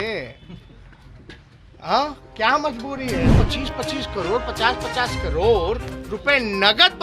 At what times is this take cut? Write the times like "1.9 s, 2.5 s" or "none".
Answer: 3.3 s